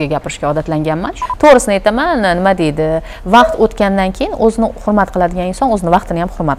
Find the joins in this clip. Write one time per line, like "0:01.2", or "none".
0:01.2